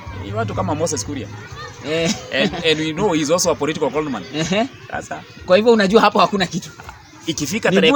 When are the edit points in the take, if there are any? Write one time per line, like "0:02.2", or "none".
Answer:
none

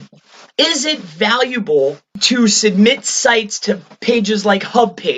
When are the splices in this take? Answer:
0:02.1

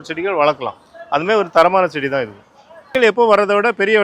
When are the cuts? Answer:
none

